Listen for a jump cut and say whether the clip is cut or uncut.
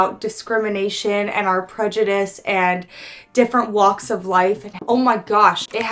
cut